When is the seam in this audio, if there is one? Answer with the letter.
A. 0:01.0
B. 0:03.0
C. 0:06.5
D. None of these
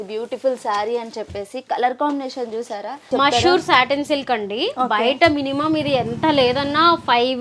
B